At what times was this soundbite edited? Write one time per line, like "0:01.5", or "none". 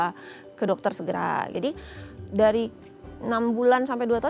0:01.5